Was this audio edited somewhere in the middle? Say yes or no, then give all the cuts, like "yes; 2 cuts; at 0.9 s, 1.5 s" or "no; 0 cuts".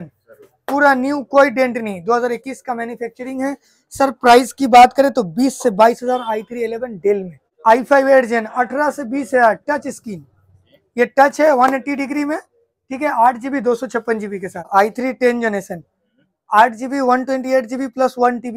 yes; 2 cuts; at 7.4 s, 14.7 s